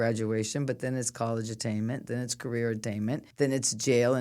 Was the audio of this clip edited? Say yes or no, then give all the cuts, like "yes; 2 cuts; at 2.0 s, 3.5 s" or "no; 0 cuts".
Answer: yes; 1 cut; at 3.3 s